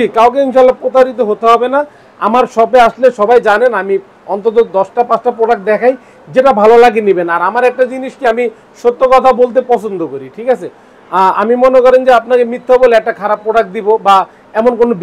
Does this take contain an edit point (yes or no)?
no